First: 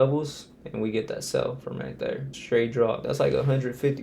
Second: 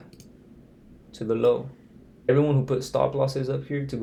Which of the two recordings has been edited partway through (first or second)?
first